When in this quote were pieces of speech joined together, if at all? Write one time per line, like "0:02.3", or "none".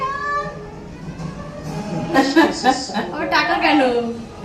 0:02.2